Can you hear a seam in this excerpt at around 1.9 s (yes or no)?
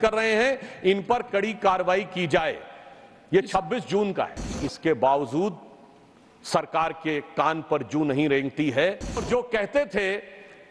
no